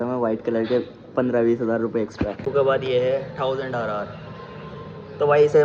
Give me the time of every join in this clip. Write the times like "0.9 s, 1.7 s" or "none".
2.5 s